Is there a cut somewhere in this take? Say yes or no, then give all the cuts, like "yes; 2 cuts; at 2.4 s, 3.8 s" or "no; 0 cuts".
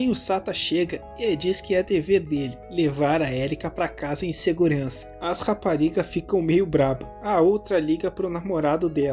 yes; 1 cut; at 5.1 s